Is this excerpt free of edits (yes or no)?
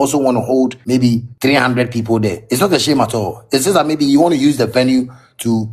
no